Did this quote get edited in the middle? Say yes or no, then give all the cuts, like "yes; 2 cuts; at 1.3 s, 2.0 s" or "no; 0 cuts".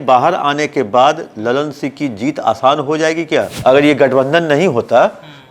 yes; 1 cut; at 3.5 s